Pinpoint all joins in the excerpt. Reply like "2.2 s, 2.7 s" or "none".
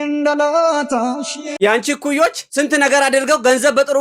1.5 s